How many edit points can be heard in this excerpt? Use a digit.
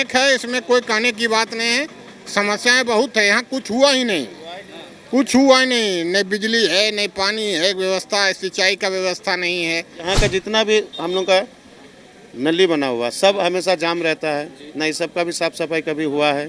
1